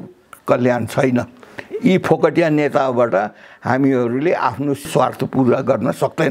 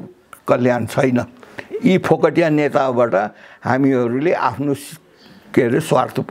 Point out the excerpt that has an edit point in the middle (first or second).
first